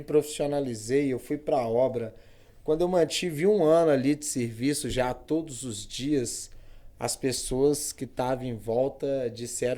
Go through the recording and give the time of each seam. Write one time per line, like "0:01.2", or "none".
none